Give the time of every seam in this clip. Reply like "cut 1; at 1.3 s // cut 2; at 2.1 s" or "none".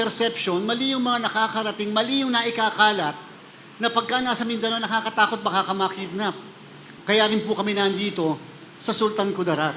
cut 1; at 6.9 s